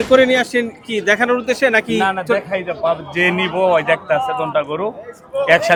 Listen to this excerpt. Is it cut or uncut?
uncut